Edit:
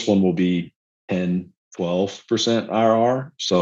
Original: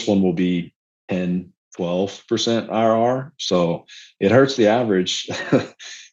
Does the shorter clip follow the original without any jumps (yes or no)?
yes